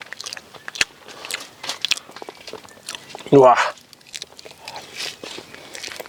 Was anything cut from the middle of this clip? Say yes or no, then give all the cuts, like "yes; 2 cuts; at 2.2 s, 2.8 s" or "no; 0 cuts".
no; 0 cuts